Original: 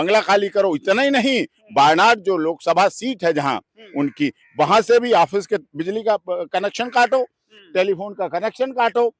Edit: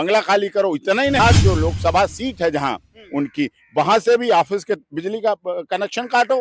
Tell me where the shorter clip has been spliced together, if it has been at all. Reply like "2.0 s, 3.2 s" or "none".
1.2 s

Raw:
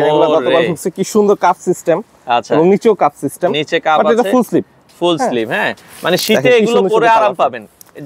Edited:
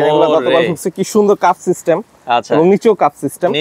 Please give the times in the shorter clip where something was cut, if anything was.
none

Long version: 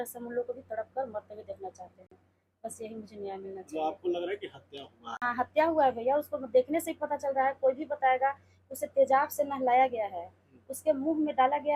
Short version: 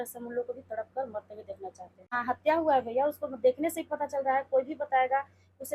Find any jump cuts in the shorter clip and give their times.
1.9 s

